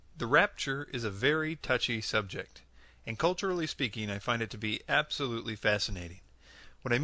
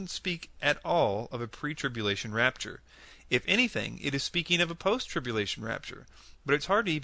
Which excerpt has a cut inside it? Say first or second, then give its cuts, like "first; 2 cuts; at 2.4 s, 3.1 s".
second; 1 cut; at 3.6 s